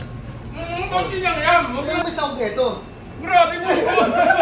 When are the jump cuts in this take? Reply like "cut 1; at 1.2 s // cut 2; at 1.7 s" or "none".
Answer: cut 1; at 2.0 s